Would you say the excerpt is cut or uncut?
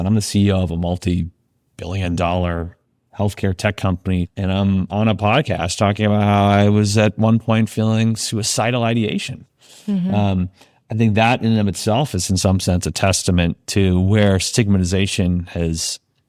uncut